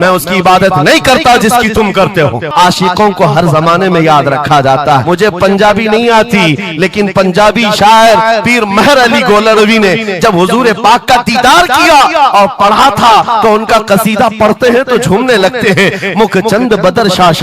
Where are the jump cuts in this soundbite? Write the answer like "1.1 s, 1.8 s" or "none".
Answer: 2.5 s, 5.0 s